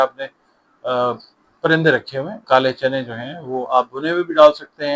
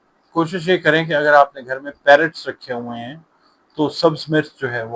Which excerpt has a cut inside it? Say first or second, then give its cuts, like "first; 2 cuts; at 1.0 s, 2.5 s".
first; 1 cut; at 2.4 s